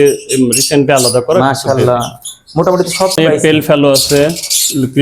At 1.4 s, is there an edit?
no; 1 cut; at 3.2 s

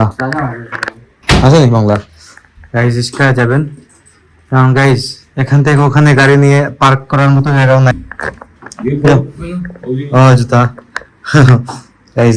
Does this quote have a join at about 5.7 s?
no; 1 cut; at 7.9 s

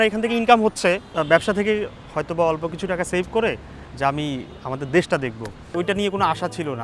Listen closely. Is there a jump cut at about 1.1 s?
yes; 2 cuts; at 1.1 s, 5.7 s

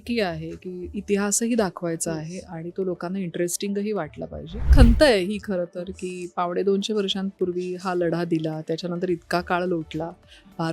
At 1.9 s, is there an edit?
no; 1 cut; at 4.7 s

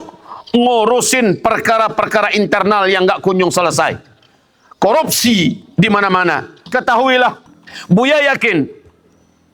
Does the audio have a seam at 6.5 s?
yes; 1 cut; at 6.5 s

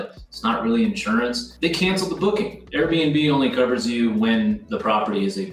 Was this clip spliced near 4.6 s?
no; 2 cuts; at 1.5 s, 2.6 s

